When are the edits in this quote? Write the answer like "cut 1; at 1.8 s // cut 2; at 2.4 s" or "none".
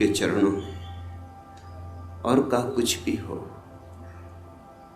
cut 1; at 3.6 s